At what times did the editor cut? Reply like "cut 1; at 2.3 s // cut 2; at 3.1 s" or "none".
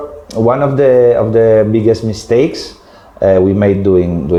none

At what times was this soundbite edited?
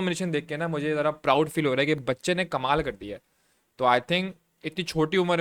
none

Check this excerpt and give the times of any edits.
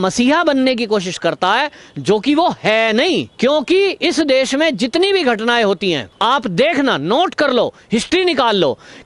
cut 1; at 3.3 s // cut 2; at 6.1 s

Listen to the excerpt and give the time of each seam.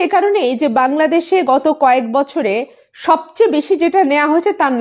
none

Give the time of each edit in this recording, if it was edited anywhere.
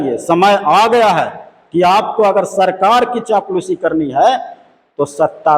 none

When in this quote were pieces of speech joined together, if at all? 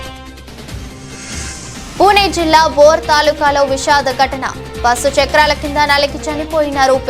cut 1; at 1.3 s

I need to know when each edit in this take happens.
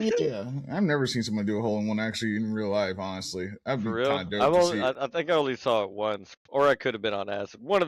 none

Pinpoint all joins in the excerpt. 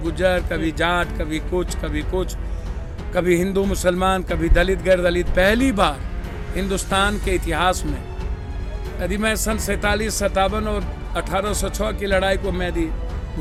none

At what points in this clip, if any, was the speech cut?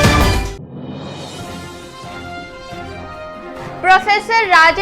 cut 1; at 1.4 s

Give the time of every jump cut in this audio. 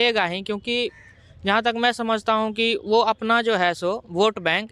none

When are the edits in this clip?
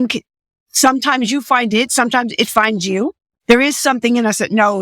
cut 1; at 3.3 s

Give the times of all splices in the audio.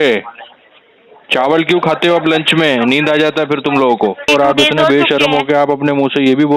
cut 1; at 4.3 s

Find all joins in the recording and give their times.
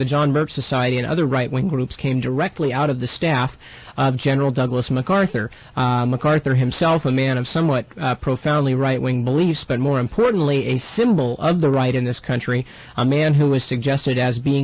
cut 1; at 7.1 s

